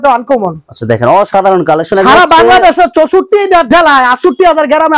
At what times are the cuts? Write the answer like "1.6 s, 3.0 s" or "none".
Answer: none